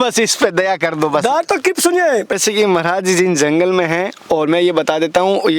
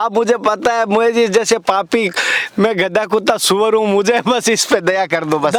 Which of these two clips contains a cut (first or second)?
first